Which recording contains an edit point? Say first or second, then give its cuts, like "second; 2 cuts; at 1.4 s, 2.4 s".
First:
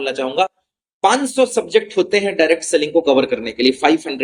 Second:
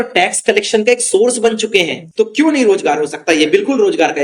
second; 1 cut; at 2.0 s